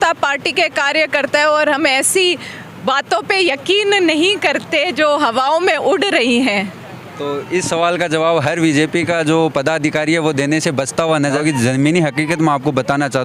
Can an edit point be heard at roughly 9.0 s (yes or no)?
no